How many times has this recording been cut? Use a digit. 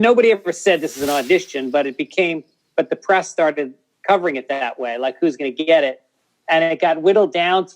0